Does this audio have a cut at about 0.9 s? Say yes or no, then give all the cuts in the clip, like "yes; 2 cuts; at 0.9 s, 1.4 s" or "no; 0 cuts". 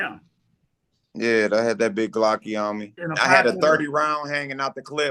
no; 1 cut; at 3.0 s